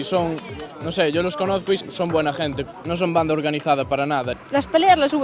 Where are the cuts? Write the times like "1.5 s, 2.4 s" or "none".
4.3 s

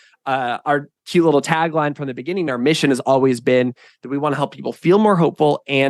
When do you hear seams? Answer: 0.9 s

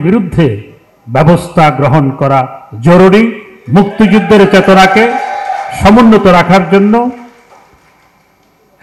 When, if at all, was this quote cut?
none

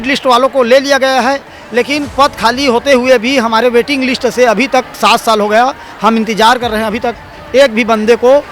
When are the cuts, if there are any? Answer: none

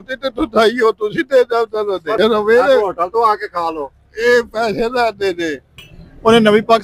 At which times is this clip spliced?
2.2 s, 5.7 s

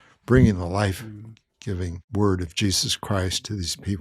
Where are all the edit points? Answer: 2.0 s

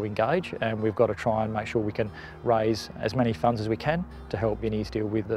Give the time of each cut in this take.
none

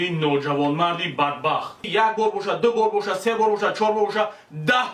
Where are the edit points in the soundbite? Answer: 1.8 s

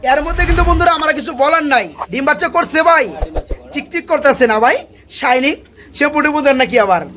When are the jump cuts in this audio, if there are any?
2.0 s

